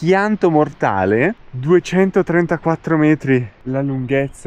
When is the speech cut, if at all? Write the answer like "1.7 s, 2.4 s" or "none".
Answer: none